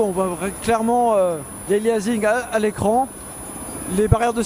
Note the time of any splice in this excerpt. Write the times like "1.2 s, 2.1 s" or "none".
none